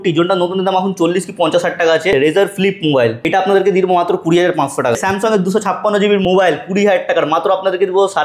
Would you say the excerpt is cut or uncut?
cut